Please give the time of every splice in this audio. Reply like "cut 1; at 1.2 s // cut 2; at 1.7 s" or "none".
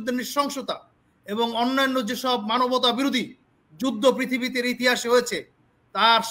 none